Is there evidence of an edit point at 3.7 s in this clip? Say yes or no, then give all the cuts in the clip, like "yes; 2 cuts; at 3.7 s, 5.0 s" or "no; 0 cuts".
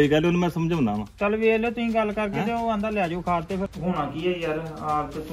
yes; 1 cut; at 3.7 s